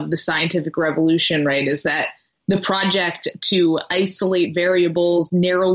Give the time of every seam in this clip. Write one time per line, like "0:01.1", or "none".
none